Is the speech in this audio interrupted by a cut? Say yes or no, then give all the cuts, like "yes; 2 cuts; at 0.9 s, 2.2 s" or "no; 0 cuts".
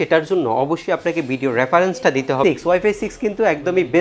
yes; 1 cut; at 2.4 s